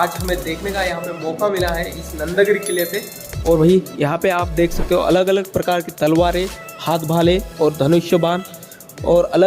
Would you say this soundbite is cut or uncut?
uncut